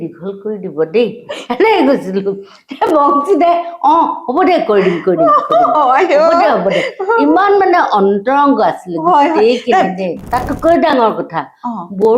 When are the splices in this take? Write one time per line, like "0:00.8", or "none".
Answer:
0:10.2